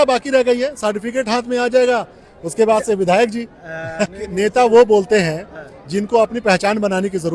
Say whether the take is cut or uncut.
cut